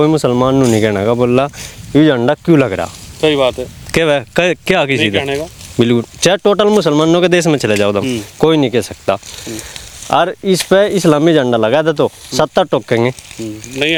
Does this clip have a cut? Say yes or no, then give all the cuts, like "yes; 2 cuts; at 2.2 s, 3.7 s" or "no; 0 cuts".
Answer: no; 0 cuts